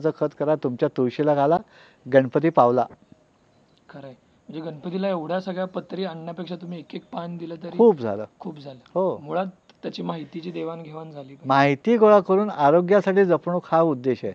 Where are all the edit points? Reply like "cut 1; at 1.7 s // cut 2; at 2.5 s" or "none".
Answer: none